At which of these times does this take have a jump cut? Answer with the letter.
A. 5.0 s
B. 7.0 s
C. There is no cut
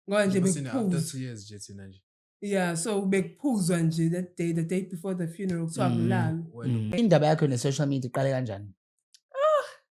B